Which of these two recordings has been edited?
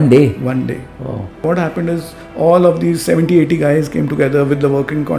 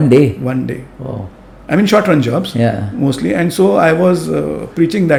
first; 1 cut; at 1.4 s

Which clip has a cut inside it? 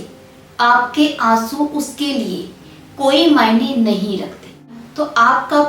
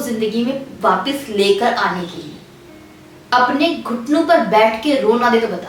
first; 1 cut; at 4.7 s

